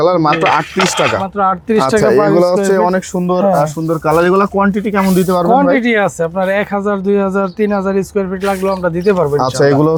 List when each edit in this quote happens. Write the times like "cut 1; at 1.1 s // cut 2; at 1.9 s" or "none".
none